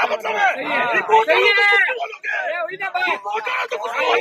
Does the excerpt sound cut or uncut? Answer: uncut